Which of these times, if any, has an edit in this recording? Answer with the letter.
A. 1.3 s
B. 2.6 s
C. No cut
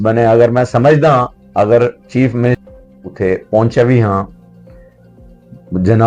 B